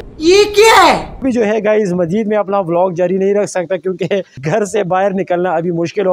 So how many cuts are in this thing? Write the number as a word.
one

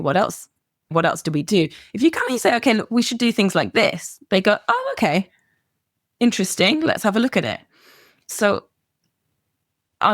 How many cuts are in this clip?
one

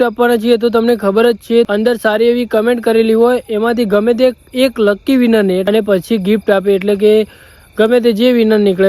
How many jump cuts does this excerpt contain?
two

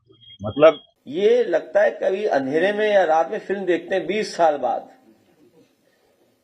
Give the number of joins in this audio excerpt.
one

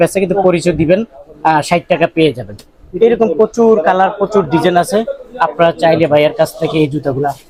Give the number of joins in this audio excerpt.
zero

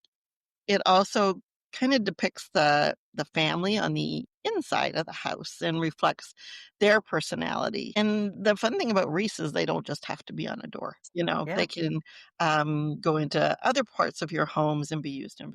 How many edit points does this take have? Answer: one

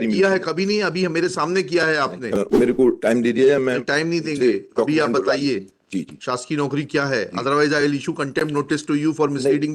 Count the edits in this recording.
one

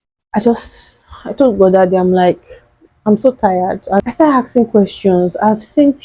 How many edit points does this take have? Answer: one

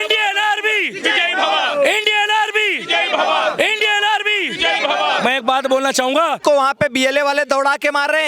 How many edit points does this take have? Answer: one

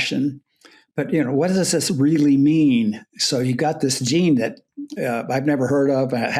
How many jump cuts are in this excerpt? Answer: zero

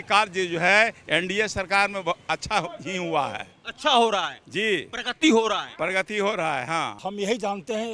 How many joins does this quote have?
one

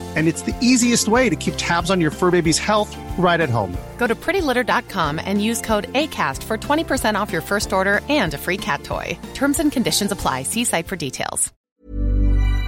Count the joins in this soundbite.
one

